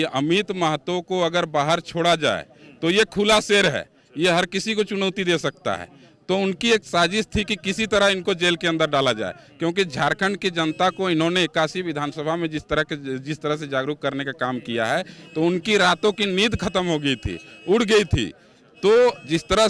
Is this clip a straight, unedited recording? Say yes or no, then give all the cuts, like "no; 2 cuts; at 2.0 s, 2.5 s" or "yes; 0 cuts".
yes; 0 cuts